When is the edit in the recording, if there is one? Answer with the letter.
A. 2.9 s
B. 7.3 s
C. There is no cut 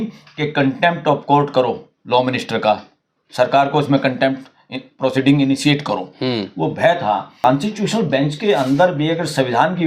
B